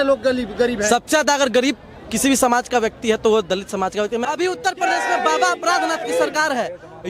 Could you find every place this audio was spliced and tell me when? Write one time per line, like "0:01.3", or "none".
0:04.2